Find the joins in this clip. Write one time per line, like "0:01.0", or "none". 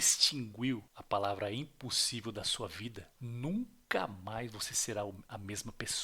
0:00.9
0:03.1